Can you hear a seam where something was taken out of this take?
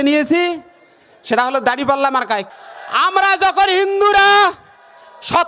yes; 1 cut; at 2.5 s

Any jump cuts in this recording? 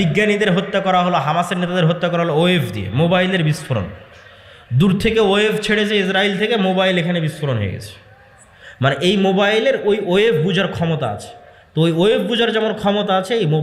no; 0 cuts

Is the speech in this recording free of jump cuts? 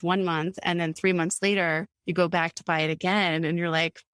yes; 0 cuts

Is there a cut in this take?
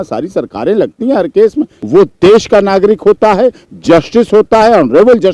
yes; 1 cut; at 1.8 s

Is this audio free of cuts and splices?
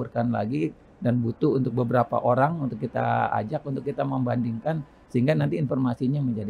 yes; 0 cuts

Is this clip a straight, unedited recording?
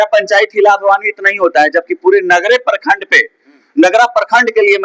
yes; 0 cuts

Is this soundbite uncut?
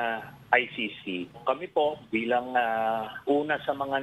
no; 1 cut; at 1.4 s

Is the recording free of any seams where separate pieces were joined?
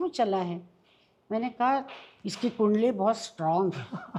yes; 0 cuts

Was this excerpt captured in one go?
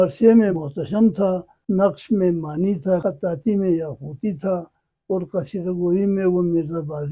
no; 2 cuts; at 1.1 s, 3.0 s

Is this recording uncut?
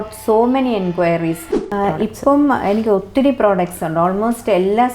no; 1 cut; at 1.6 s

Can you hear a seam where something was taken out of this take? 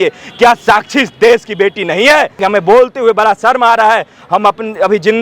yes; 1 cut; at 2.4 s

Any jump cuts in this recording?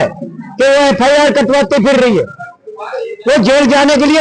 no; 0 cuts

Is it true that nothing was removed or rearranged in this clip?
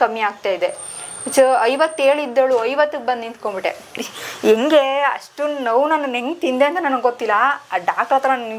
yes; 0 cuts

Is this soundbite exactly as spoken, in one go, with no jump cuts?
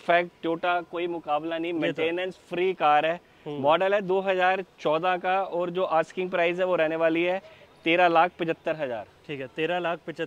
yes; 0 cuts

